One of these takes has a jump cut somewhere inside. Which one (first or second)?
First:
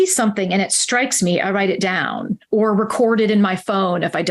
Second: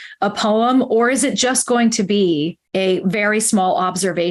second